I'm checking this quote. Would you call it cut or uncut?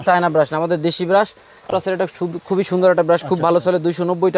cut